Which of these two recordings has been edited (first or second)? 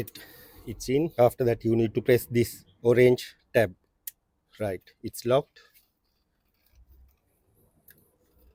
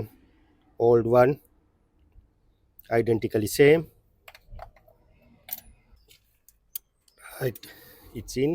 second